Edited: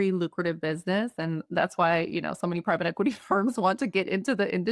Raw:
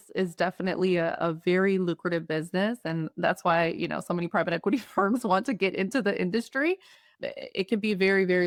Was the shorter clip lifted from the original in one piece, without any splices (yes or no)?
yes